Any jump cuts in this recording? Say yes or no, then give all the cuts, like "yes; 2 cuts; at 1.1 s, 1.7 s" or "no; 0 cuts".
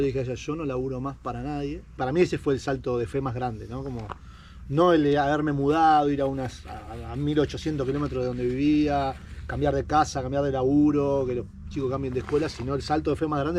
no; 0 cuts